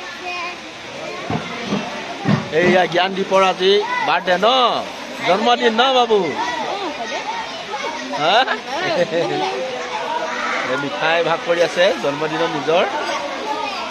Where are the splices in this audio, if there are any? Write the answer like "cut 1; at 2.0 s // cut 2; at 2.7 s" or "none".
none